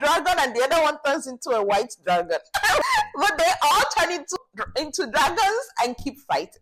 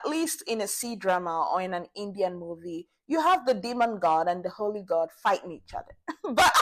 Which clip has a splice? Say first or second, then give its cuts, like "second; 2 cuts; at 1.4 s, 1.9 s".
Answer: first; 2 cuts; at 2.8 s, 4.3 s